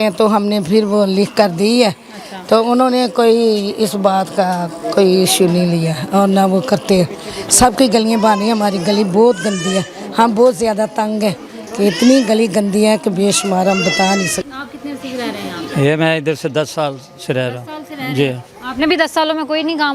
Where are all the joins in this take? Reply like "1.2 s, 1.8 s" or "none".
none